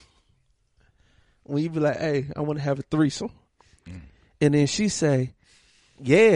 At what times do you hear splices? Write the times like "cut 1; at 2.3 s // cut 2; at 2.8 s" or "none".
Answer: none